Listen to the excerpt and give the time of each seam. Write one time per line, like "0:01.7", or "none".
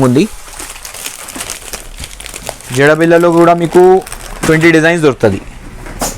0:02.6